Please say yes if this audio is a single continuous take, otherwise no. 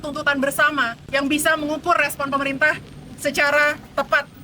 no